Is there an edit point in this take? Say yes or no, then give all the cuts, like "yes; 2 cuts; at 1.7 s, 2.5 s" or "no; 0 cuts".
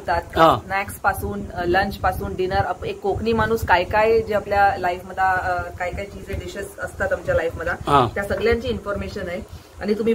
no; 0 cuts